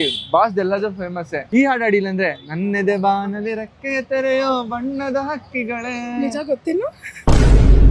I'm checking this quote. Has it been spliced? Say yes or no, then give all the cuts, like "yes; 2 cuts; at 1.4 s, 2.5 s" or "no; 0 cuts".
no; 0 cuts